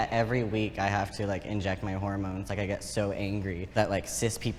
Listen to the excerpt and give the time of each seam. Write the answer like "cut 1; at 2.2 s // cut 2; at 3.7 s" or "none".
none